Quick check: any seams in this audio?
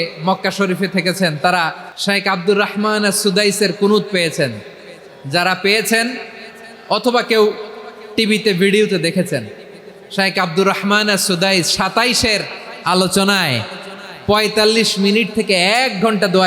yes; 1 cut; at 1.9 s

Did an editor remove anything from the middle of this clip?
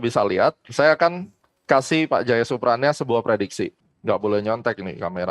yes; 1 cut; at 3.8 s

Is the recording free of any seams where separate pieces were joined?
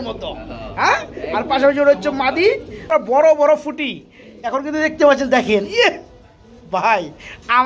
no; 1 cut; at 2.9 s

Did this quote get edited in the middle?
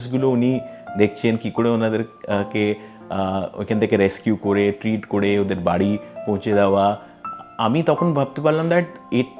no; 0 cuts

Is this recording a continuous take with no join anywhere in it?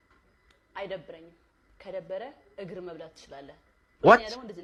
yes; 0 cuts

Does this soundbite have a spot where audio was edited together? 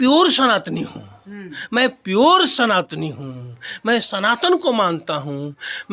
no; 0 cuts

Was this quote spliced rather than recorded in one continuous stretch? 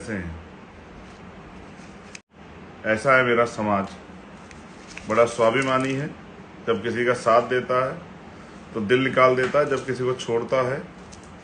yes; 1 cut; at 2.3 s

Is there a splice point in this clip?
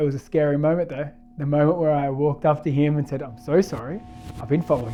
no; 0 cuts

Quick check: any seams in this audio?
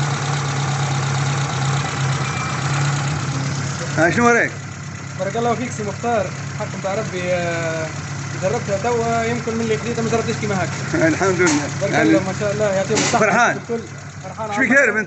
no; 0 cuts

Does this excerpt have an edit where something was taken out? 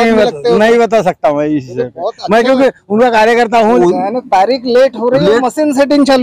yes; 1 cut; at 3.8 s

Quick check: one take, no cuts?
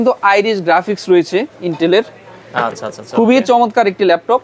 yes; 0 cuts

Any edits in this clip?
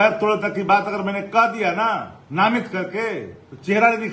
yes; 1 cut; at 2.2 s

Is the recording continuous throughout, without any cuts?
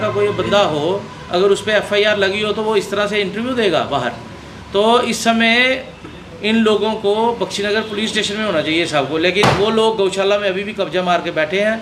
yes; 0 cuts

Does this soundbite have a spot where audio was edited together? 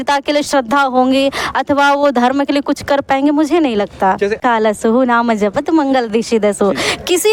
yes; 1 cut; at 4.4 s

